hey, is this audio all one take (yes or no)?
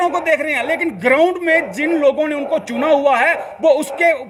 yes